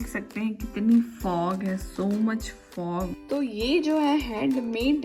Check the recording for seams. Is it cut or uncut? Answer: cut